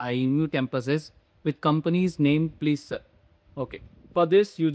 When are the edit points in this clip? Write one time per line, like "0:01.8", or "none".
none